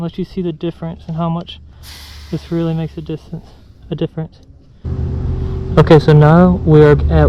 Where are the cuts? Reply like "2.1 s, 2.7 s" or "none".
4.9 s

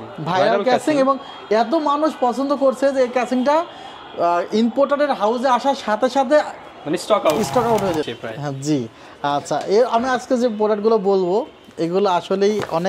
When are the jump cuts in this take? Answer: 8.2 s

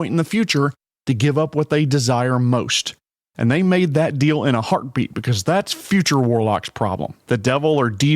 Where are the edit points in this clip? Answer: 7.1 s

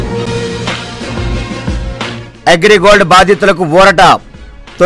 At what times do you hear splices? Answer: 1.7 s

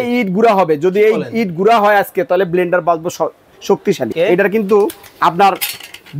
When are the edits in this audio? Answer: 4.0 s

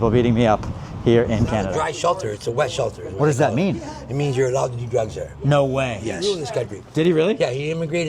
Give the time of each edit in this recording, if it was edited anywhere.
1.7 s, 6.2 s

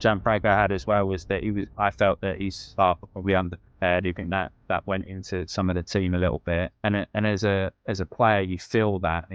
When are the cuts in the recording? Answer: 4.2 s, 6.7 s

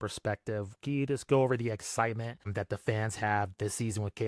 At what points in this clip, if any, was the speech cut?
2.5 s

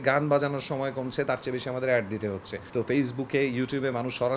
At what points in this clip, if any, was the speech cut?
2.6 s

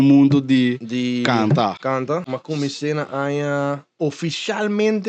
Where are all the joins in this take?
2.3 s

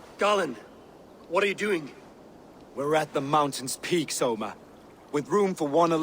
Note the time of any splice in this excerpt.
1.2 s, 2.1 s

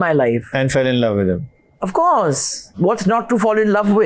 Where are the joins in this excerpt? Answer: 2.7 s

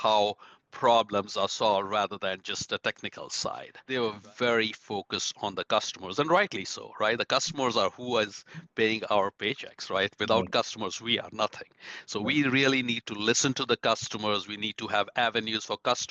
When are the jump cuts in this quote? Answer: 3.7 s

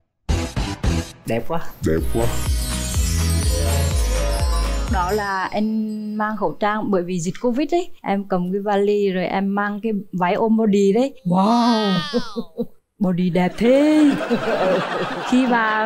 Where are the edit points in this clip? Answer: none

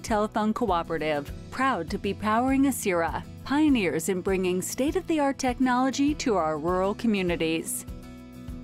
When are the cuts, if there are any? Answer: 7.7 s

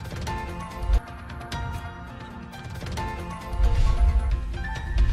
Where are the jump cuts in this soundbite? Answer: none

